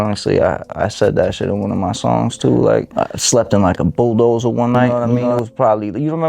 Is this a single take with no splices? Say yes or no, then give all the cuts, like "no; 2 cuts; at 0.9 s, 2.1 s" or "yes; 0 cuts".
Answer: no; 1 cut; at 2.9 s